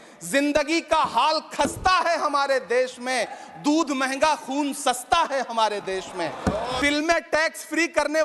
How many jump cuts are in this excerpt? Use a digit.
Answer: 1